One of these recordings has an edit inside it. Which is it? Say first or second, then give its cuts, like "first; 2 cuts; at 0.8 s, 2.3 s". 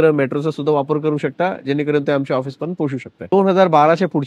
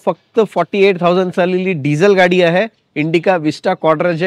first; 1 cut; at 3.3 s